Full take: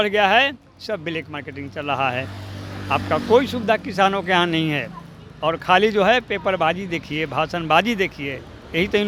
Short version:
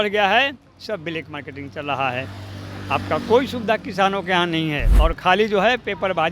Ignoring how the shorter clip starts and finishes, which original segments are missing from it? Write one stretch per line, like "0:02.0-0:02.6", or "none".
0:04.9-0:05.3

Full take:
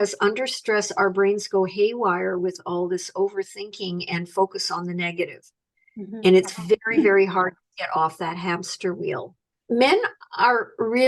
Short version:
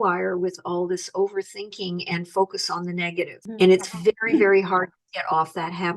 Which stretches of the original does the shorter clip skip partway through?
0:05.4-0:06.1

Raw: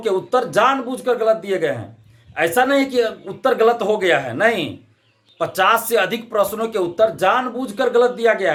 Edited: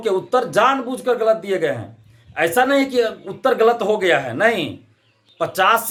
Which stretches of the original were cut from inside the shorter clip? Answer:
none

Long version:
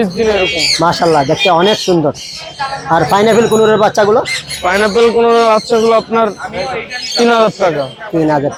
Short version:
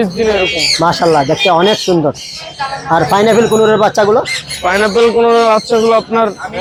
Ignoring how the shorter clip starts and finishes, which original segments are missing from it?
none

